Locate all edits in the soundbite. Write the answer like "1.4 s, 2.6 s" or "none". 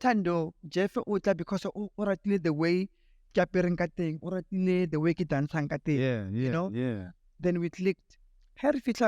8.1 s